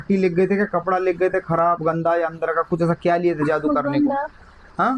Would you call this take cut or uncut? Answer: uncut